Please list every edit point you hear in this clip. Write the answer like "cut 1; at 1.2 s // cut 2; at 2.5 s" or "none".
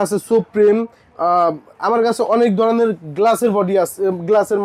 none